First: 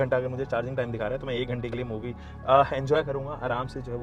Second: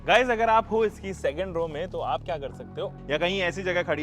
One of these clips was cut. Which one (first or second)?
second